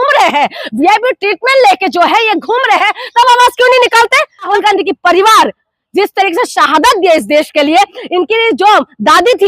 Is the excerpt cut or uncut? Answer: cut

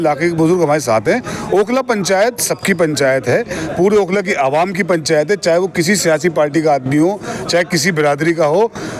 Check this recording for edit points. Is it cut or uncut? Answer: uncut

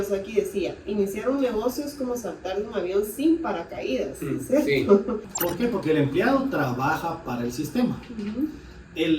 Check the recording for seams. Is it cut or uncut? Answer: cut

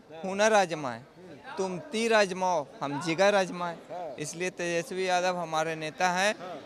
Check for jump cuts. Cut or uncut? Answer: uncut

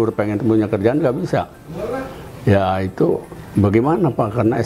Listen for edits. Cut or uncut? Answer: uncut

